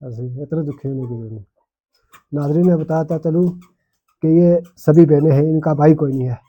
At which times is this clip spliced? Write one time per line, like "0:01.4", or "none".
none